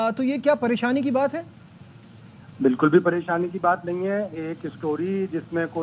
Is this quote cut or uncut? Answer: uncut